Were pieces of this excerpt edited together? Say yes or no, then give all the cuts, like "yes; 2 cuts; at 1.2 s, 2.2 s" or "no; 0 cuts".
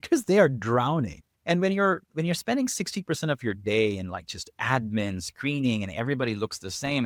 no; 0 cuts